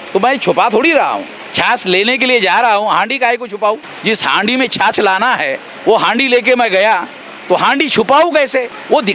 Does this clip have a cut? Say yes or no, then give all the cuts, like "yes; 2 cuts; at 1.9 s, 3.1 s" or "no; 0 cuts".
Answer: no; 0 cuts